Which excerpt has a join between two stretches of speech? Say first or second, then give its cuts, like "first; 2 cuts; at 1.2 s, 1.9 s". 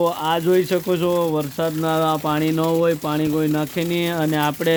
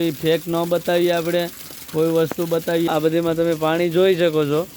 second; 1 cut; at 2.9 s